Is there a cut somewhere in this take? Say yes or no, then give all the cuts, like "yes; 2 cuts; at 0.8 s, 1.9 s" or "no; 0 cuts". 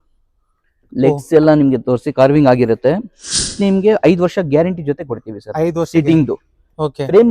yes; 1 cut; at 3.5 s